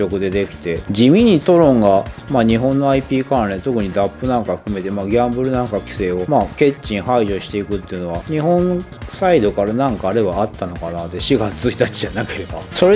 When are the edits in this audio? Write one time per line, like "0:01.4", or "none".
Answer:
none